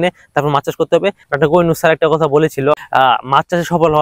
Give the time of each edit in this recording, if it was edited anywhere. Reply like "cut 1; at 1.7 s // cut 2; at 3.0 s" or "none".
cut 1; at 1.2 s // cut 2; at 2.8 s

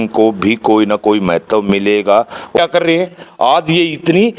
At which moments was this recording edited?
cut 1; at 2.6 s

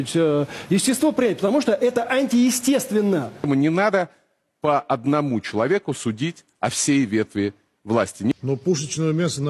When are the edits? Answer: cut 1; at 3.7 s // cut 2; at 8.3 s

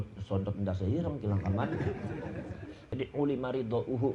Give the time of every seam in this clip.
cut 1; at 2.9 s

